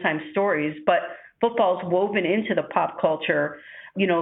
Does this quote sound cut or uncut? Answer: uncut